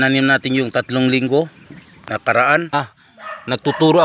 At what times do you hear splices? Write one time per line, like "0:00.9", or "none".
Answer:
0:02.7